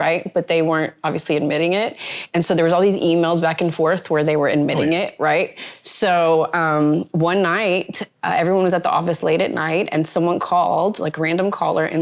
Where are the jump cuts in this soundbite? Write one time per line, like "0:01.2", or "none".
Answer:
none